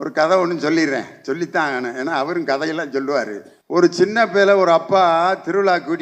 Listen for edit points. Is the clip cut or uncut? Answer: cut